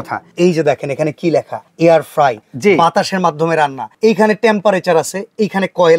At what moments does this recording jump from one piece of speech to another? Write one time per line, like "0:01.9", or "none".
none